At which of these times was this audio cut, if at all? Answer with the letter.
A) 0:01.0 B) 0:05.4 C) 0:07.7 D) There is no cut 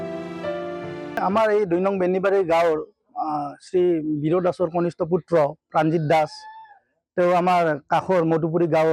A